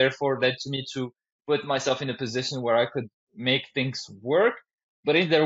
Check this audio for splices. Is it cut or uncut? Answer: uncut